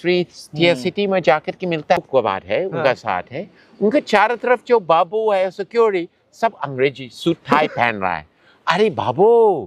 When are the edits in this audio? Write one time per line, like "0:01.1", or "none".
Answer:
0:02.1